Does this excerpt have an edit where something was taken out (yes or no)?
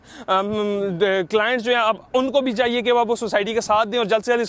no